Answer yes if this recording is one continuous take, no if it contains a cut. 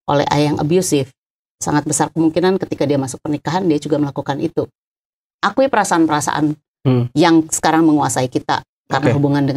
no